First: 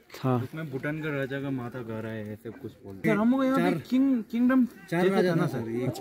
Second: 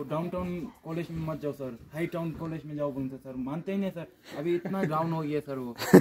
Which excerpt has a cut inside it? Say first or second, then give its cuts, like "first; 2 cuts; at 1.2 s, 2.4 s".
first; 1 cut; at 3.0 s